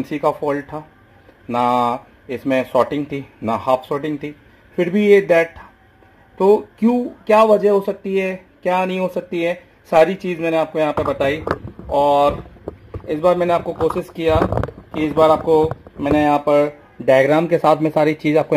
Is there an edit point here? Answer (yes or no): no